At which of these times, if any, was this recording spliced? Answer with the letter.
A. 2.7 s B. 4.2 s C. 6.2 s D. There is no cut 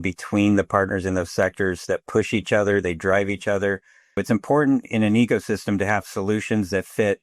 B